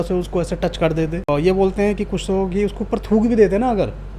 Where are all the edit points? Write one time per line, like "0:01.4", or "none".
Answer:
0:01.3